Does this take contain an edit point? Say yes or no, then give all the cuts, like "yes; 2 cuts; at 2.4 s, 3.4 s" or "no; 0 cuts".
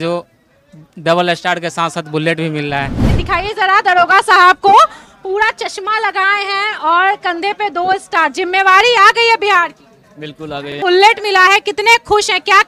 yes; 2 cuts; at 3.1 s, 10.8 s